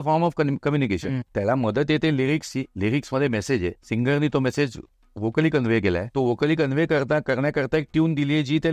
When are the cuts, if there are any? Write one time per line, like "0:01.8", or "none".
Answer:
0:01.2
0:02.7
0:03.8
0:06.1